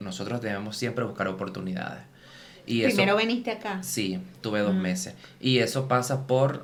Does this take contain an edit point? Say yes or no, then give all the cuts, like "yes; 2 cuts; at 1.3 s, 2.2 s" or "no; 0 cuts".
no; 0 cuts